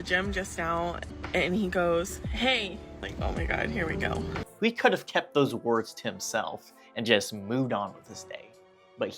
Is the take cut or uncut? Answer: cut